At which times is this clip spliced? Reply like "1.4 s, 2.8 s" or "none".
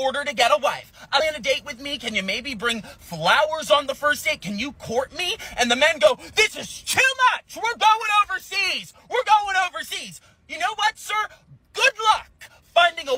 1.2 s, 5.7 s